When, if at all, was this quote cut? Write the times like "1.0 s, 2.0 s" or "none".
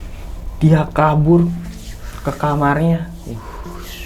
none